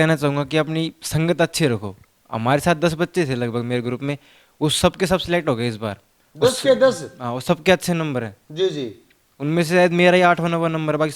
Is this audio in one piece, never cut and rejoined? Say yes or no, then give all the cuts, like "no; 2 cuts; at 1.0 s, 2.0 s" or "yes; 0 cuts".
yes; 0 cuts